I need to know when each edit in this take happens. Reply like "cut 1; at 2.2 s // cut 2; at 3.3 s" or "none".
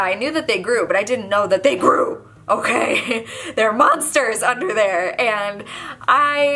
none